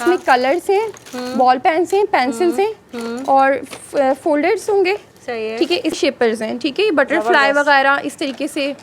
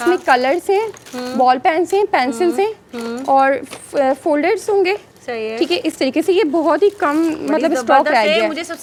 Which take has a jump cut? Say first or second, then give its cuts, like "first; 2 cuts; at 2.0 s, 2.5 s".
first; 1 cut; at 6.0 s